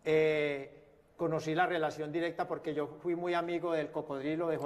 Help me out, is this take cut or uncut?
cut